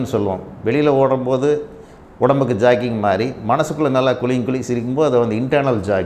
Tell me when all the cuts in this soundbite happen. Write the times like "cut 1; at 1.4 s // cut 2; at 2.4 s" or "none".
none